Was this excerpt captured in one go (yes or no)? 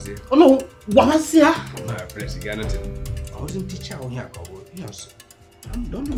yes